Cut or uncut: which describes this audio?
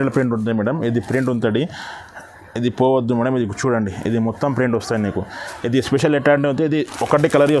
uncut